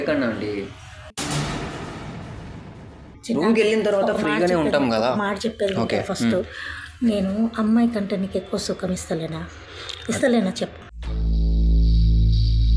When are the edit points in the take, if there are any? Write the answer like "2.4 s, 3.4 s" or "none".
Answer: 3.1 s